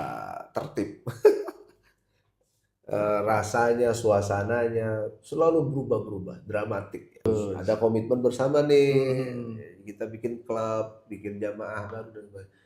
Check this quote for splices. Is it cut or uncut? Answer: cut